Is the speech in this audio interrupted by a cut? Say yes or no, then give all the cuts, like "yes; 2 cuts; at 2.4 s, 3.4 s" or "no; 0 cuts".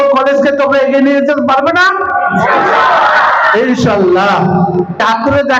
no; 0 cuts